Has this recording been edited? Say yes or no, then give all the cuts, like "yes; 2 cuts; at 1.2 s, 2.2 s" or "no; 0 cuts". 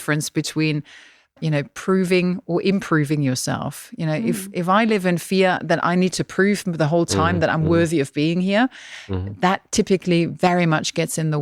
no; 0 cuts